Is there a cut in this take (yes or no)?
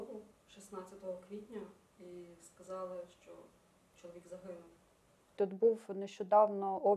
yes